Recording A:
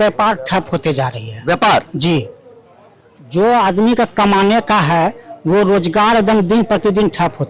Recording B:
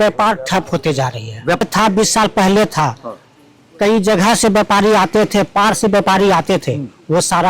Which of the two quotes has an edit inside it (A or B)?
B